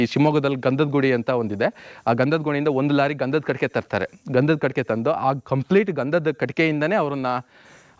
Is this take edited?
no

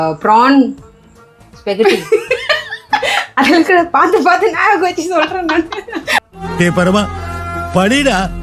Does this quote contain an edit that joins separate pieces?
no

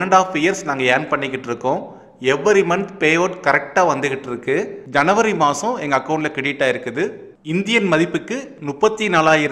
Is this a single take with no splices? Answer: no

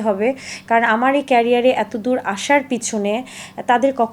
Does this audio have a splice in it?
no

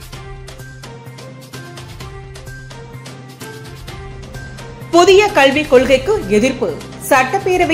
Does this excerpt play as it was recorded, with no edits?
no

